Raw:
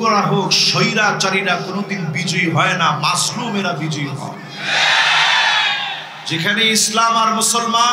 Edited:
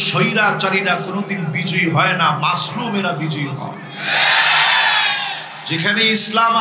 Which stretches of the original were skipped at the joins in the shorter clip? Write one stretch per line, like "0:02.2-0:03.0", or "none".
none